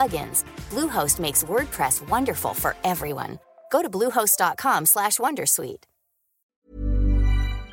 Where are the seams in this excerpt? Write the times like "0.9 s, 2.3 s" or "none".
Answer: 6.6 s